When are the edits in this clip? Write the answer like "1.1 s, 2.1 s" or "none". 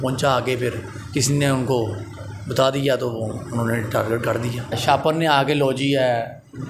4.8 s